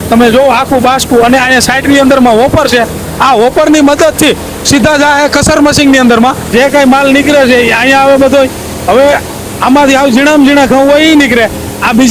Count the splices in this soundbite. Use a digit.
1